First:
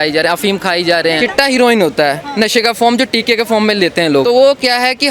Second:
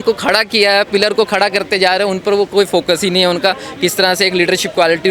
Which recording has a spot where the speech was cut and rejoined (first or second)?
first